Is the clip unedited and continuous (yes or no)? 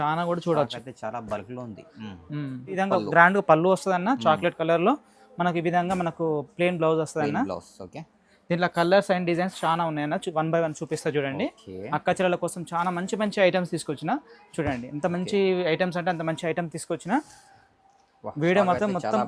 no